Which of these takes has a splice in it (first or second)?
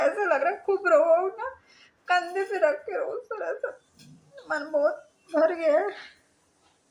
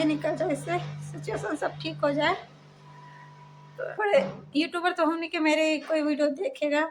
second